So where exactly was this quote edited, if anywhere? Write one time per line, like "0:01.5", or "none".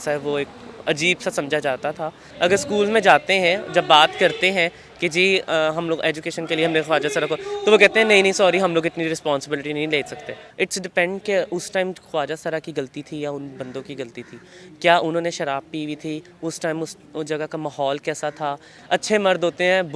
0:02.2
0:10.3
0:18.7